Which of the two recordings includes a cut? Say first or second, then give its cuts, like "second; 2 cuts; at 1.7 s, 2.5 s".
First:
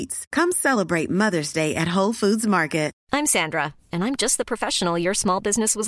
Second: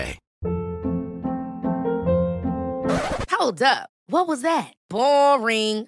first; 1 cut; at 3.0 s